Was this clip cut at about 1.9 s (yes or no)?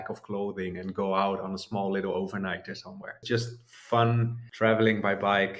no